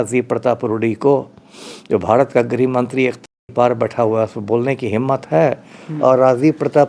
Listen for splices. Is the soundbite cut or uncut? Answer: uncut